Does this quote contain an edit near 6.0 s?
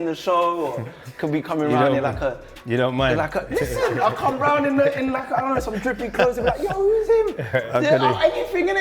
no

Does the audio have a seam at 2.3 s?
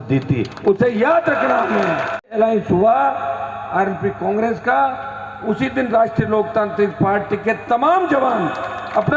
yes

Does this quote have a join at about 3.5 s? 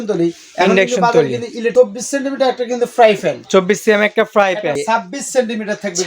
no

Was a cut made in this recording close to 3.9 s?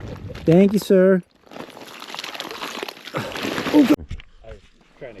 yes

